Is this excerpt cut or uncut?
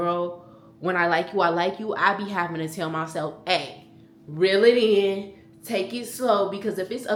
uncut